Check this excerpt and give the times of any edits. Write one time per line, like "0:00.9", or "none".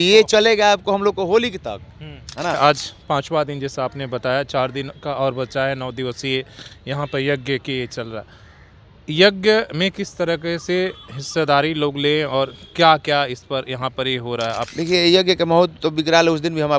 0:02.6
0:14.7